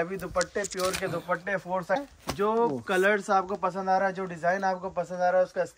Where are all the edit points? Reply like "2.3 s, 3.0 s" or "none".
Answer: 2.1 s